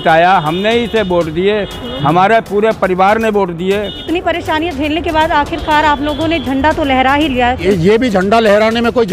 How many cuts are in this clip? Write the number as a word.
two